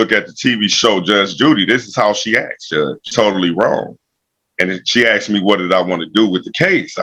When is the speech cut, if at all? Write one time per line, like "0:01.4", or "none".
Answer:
none